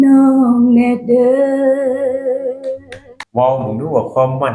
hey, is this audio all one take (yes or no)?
no